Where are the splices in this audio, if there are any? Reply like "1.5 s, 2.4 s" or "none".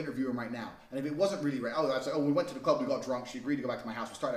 none